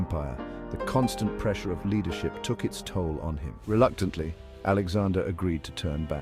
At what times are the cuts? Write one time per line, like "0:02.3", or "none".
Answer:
0:03.5